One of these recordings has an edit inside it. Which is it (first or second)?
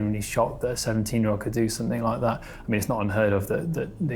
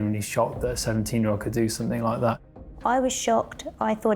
second